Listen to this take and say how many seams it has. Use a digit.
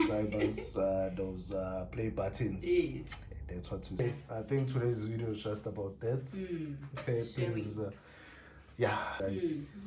2